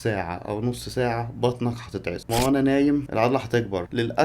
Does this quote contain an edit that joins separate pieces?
yes; 1 cut; at 2.3 s

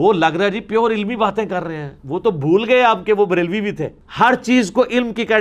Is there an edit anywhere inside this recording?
no; 0 cuts

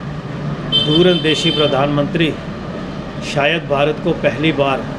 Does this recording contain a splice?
no; 0 cuts

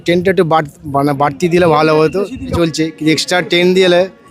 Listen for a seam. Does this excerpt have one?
yes; 1 cut; at 2.5 s

